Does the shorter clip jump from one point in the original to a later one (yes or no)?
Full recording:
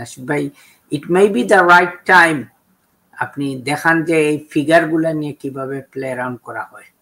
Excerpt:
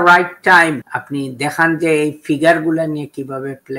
yes